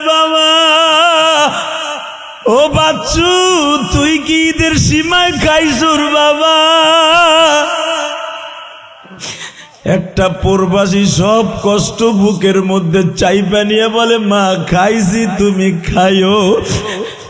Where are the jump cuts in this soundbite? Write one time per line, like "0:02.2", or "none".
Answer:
none